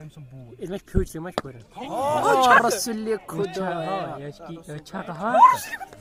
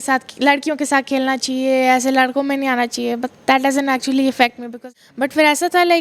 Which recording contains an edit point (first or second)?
second